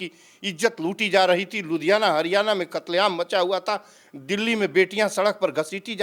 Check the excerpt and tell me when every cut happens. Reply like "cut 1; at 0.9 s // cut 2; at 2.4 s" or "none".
none